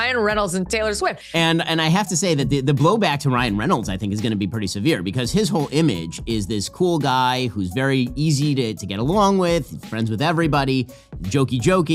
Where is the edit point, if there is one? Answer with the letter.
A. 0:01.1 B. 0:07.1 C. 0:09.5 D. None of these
D